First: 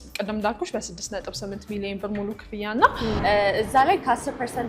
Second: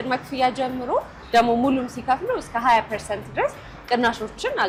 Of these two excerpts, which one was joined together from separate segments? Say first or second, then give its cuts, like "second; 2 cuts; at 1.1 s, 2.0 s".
first; 1 cut; at 3.2 s